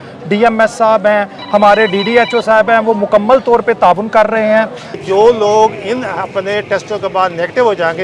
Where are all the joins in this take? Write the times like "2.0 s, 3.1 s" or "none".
5.0 s